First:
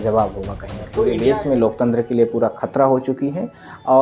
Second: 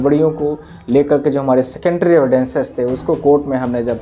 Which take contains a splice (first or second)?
first